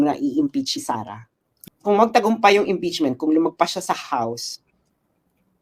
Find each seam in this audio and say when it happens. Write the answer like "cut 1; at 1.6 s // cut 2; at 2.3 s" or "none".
cut 1; at 1.6 s